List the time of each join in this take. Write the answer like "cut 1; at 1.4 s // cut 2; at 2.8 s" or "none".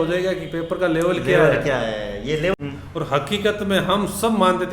cut 1; at 2.6 s